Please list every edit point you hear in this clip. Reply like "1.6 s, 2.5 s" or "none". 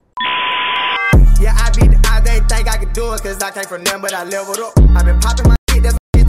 1.0 s